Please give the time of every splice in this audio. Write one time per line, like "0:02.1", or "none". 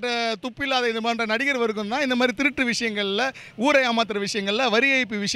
none